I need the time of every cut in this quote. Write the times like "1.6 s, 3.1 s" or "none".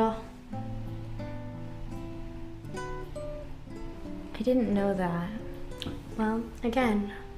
none